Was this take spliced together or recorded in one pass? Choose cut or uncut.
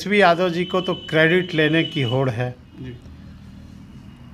uncut